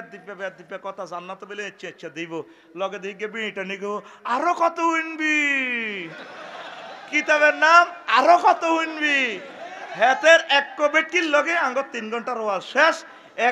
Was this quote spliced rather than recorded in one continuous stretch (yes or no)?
no